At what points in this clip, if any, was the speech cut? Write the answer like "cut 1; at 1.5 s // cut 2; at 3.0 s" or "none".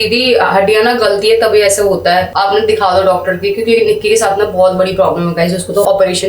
none